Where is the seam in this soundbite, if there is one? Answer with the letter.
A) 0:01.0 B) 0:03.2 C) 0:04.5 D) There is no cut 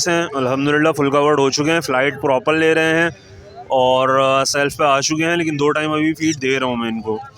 D